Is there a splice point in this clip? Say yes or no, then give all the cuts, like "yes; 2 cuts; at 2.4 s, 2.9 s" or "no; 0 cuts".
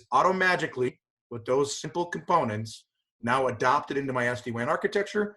no; 0 cuts